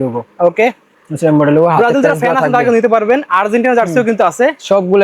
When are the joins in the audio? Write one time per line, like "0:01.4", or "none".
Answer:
none